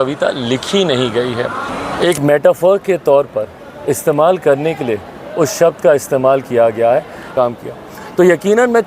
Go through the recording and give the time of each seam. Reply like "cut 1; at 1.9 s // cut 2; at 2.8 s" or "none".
cut 1; at 1.7 s // cut 2; at 7.3 s